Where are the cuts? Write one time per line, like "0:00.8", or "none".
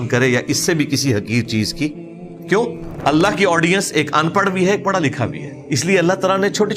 0:02.9
0:05.5